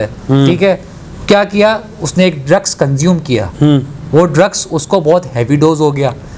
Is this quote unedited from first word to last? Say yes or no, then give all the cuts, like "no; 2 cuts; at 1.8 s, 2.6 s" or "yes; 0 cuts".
yes; 0 cuts